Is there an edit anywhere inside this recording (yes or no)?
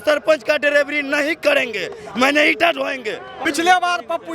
yes